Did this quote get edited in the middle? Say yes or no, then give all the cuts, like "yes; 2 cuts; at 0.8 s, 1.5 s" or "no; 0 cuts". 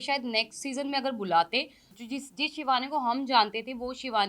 yes; 1 cut; at 1.9 s